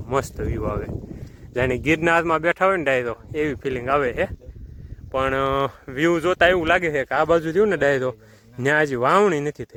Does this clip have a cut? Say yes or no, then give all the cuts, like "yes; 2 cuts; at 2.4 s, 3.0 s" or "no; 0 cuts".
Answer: no; 0 cuts